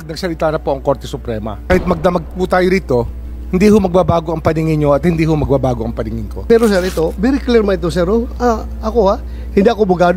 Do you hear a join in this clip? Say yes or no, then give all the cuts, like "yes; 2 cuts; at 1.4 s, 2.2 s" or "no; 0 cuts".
yes; 2 cuts; at 1.6 s, 6.4 s